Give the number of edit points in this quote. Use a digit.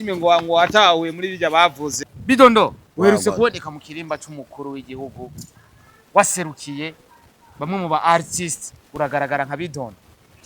1